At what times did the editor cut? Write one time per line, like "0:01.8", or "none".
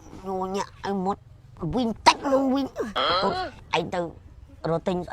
0:03.2